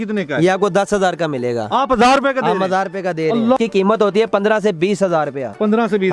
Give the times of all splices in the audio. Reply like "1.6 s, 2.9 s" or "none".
3.6 s